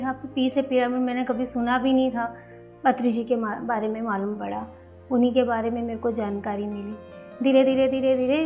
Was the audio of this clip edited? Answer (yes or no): yes